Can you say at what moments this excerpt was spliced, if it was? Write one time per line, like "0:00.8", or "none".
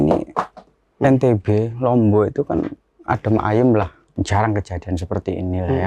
0:04.0